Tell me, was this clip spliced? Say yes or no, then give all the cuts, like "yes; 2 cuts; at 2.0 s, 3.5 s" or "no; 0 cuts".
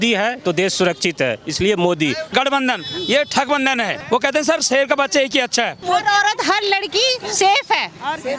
yes; 3 cuts; at 2.3 s, 4.0 s, 5.9 s